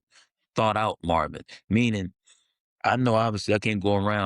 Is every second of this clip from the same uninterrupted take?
yes; 0 cuts

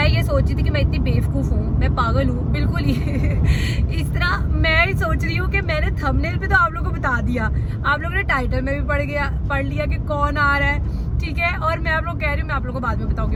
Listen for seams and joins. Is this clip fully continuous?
yes; 0 cuts

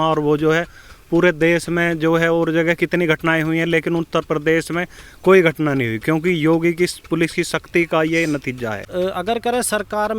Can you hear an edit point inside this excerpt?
yes; 1 cut; at 8.9 s

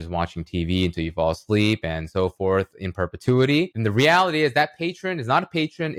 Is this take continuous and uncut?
no; 1 cut; at 3.8 s

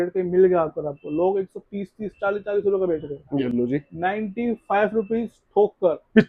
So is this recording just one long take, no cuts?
yes; 0 cuts

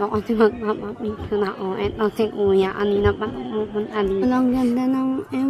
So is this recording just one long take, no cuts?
no; 1 cut; at 4.2 s

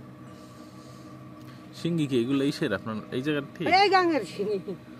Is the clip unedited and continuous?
yes; 0 cuts

